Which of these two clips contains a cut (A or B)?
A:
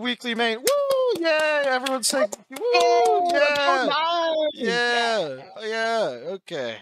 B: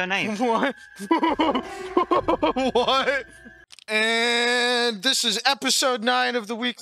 B